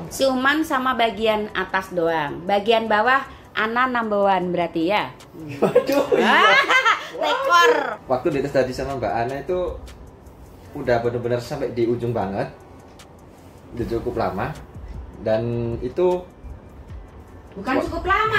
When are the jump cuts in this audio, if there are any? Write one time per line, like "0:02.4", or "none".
0:08.0